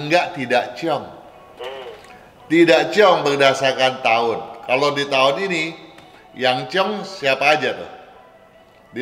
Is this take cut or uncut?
uncut